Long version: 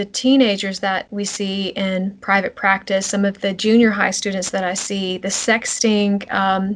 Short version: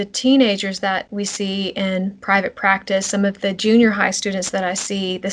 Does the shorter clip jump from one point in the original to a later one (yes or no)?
no